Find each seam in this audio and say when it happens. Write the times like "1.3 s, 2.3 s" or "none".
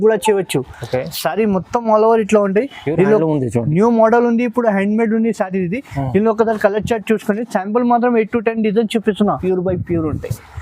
9.4 s